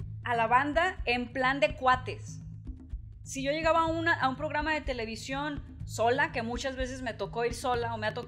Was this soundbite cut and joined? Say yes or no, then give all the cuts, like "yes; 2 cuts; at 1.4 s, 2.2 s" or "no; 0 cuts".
no; 0 cuts